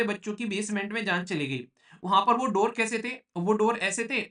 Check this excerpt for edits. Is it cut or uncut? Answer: uncut